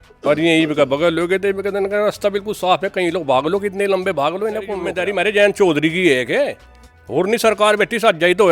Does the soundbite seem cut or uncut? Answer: cut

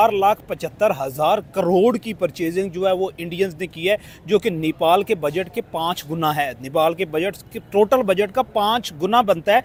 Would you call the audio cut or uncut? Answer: uncut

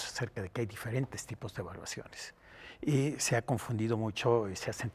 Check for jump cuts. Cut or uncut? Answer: uncut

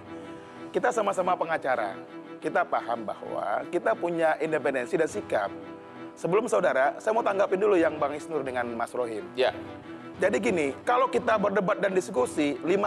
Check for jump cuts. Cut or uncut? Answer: uncut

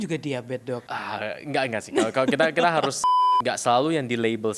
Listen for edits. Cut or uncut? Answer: cut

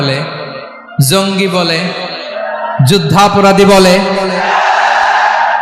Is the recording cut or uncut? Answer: uncut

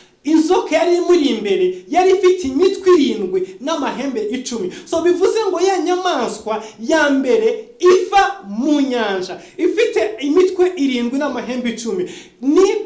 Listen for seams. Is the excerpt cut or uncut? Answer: uncut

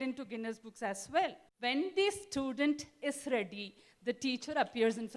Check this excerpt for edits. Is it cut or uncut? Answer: cut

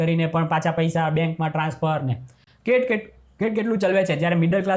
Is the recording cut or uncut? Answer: uncut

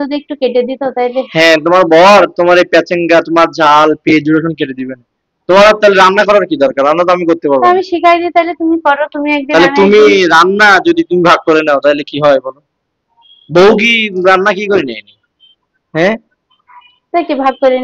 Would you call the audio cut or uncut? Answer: uncut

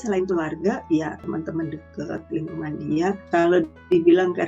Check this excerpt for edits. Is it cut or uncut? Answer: cut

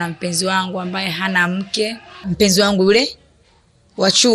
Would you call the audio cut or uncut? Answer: cut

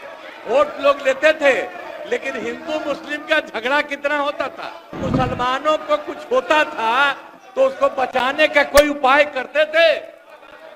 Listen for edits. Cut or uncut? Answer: cut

